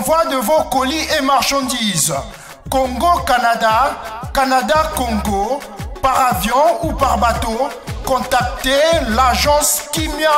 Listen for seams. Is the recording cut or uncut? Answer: uncut